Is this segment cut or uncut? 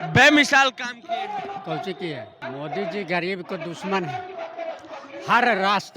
cut